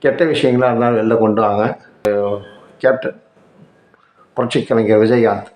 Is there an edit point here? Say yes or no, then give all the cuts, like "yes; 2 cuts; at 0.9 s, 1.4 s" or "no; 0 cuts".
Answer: yes; 1 cut; at 2.0 s